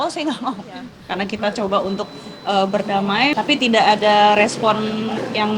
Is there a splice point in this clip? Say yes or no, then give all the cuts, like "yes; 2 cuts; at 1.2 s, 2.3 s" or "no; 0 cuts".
yes; 1 cut; at 1.0 s